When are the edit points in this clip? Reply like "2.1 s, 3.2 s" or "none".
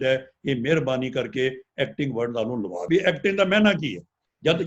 2.8 s